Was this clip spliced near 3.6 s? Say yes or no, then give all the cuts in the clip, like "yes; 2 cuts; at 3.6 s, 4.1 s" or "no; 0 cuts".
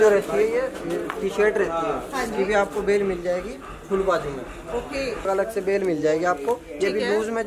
no; 1 cut; at 5.3 s